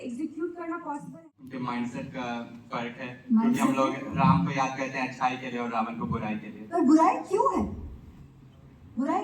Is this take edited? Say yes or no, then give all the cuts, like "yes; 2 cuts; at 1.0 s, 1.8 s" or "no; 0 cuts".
yes; 1 cut; at 1.1 s